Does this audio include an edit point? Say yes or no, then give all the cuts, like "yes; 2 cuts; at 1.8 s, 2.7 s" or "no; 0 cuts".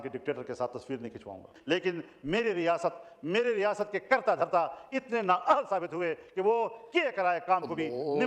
yes; 1 cut; at 1.5 s